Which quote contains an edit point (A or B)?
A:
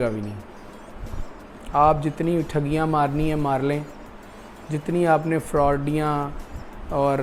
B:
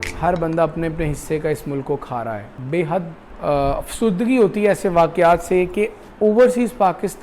B